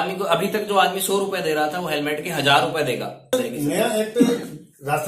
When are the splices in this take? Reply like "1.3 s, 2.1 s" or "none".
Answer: 3.3 s